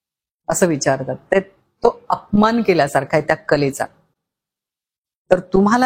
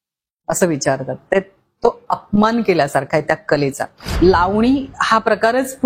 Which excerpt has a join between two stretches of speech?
second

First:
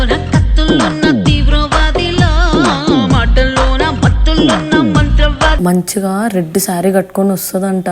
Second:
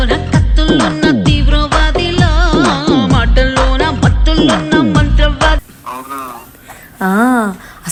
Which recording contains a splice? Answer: first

